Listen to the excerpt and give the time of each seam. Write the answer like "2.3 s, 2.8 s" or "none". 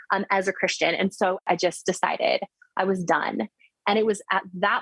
1.4 s, 3.7 s